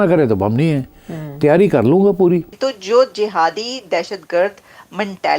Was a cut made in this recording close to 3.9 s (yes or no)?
no